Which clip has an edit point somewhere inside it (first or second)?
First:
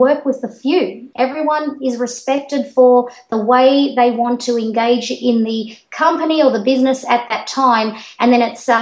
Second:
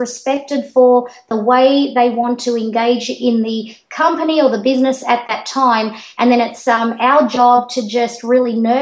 first